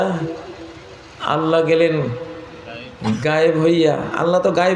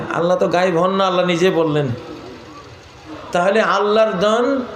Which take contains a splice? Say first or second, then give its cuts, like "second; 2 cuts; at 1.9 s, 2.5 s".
second; 1 cut; at 3.1 s